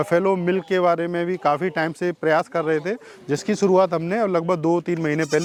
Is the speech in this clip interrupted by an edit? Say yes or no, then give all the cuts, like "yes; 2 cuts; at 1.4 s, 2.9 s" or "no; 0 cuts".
no; 0 cuts